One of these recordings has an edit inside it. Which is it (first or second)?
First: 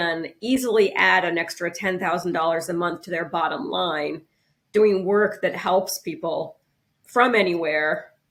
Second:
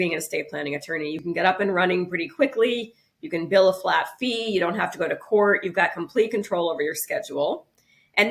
second